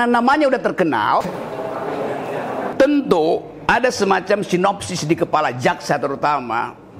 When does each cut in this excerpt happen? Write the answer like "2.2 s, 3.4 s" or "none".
1.3 s